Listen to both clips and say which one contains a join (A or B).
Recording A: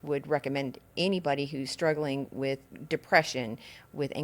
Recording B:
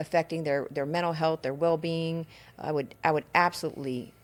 A